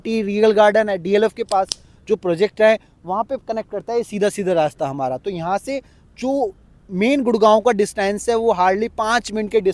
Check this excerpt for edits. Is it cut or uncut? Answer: uncut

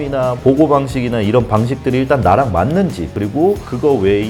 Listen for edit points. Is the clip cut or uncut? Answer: cut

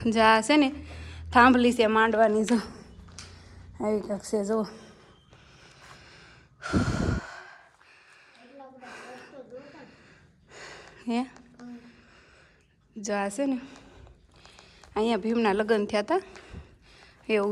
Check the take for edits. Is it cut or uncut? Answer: uncut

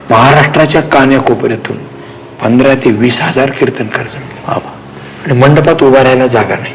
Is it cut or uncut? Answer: uncut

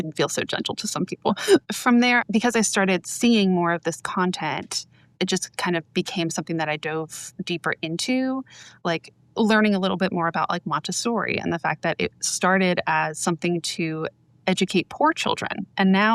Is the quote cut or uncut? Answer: uncut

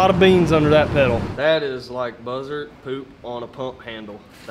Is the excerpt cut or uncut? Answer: cut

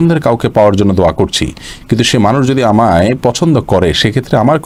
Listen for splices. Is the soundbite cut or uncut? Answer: uncut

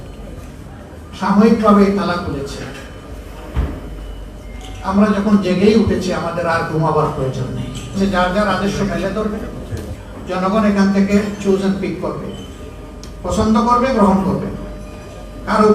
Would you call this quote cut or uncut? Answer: cut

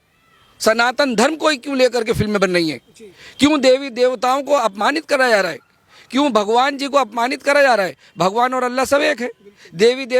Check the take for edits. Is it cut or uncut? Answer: uncut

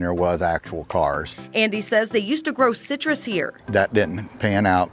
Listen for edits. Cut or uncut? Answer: uncut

